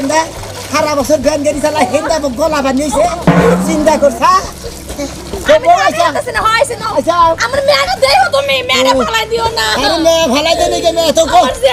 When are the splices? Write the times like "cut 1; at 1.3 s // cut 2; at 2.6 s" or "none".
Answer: none